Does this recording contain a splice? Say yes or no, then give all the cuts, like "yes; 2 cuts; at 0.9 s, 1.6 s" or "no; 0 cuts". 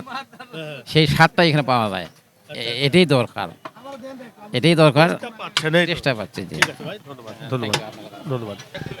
no; 0 cuts